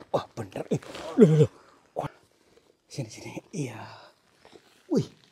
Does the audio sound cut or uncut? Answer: cut